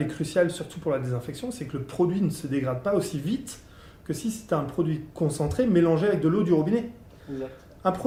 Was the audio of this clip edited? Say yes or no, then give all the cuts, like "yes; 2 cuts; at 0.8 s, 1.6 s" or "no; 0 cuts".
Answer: no; 0 cuts